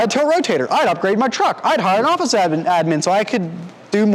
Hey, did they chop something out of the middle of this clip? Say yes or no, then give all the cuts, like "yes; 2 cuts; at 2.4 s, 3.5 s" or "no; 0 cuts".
no; 0 cuts